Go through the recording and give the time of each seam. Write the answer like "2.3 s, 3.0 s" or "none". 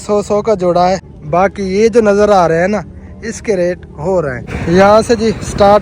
1.1 s, 4.5 s